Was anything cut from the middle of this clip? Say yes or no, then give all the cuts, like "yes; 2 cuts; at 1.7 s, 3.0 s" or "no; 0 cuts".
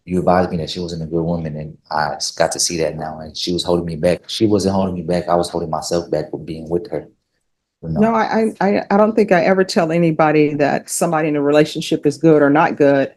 no; 0 cuts